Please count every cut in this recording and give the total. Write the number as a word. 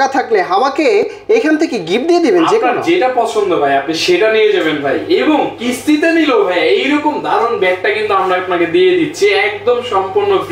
zero